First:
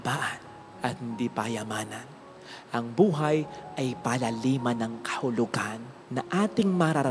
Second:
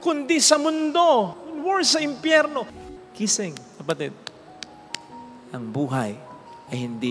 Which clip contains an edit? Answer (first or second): second